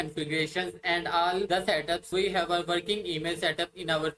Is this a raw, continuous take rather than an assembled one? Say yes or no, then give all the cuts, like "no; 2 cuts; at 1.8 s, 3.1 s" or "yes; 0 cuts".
yes; 0 cuts